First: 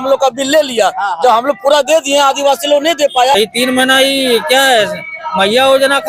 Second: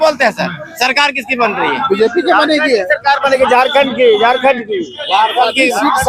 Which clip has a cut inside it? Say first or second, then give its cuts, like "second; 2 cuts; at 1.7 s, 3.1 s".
first; 1 cut; at 3.3 s